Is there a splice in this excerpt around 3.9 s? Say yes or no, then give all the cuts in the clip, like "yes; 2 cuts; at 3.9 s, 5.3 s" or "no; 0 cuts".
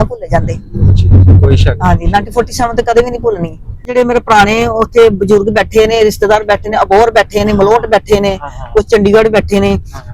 yes; 1 cut; at 3.9 s